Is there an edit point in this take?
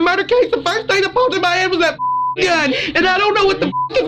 yes; 1 cut; at 2.7 s

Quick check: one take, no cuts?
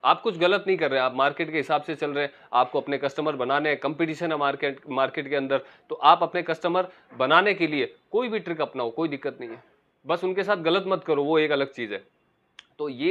yes; 0 cuts

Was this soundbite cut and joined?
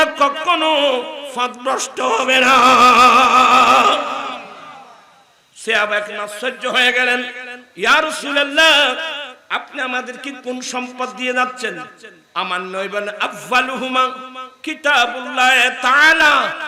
no; 0 cuts

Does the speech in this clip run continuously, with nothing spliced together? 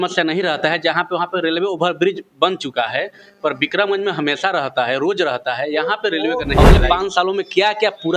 no; 1 cut; at 6.5 s

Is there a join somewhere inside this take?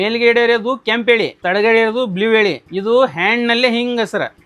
no; 0 cuts

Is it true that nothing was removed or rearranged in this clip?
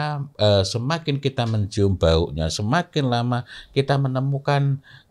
yes; 0 cuts

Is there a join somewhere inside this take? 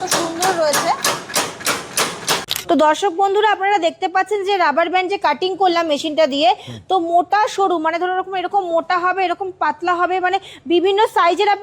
yes; 1 cut; at 2.5 s

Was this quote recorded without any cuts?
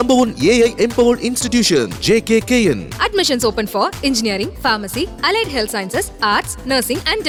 yes; 0 cuts

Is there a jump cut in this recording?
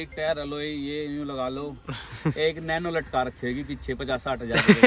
no; 0 cuts

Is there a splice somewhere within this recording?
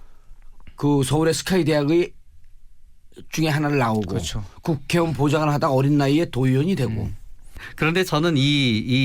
yes; 1 cut; at 8.1 s

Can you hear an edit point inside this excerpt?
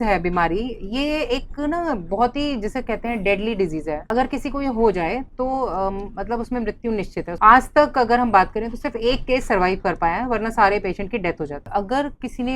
yes; 3 cuts; at 4.1 s, 7.3 s, 11.6 s

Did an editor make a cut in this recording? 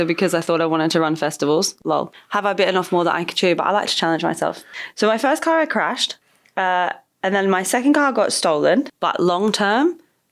yes; 3 cuts; at 1.8 s, 4.7 s, 8.9 s

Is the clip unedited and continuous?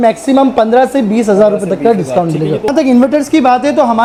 yes; 0 cuts

